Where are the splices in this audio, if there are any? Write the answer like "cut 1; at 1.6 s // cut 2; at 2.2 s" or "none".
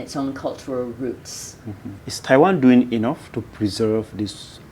none